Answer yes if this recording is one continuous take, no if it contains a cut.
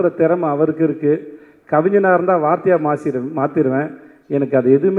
yes